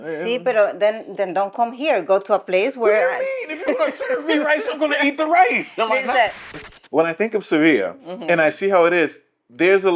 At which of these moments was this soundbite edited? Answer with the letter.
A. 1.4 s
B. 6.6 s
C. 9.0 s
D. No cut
B